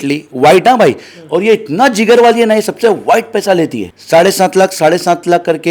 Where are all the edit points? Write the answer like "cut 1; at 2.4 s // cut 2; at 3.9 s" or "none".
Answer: cut 1; at 3.9 s